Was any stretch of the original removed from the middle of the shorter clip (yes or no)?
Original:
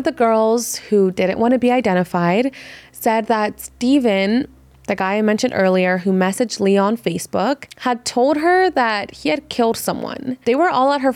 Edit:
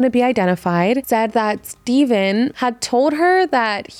yes